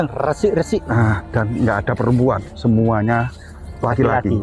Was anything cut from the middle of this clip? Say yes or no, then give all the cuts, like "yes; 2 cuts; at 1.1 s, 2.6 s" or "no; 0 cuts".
no; 0 cuts